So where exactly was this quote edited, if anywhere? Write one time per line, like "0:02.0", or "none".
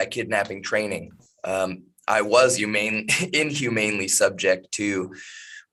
none